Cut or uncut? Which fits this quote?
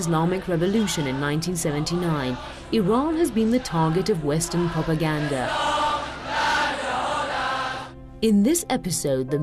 uncut